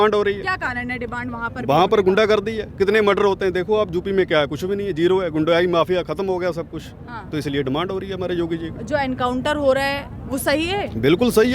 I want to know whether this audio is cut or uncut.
uncut